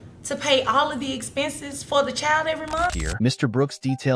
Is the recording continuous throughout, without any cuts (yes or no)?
yes